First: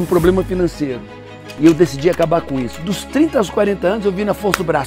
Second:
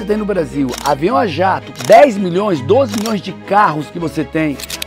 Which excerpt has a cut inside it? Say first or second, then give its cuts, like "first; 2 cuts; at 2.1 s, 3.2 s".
first; 1 cut; at 2.7 s